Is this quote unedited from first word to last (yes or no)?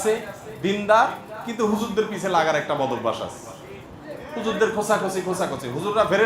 yes